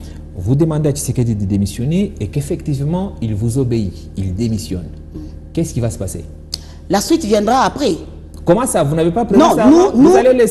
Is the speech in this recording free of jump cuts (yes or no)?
yes